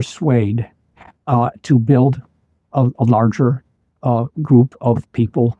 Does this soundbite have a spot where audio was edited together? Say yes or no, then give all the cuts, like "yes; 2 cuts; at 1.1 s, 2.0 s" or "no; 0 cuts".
no; 0 cuts